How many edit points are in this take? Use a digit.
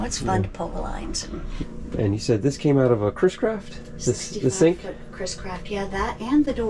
1